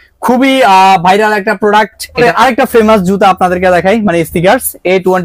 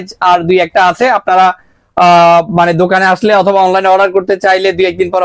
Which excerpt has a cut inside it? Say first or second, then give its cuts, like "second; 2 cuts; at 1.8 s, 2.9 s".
first; 1 cut; at 2.2 s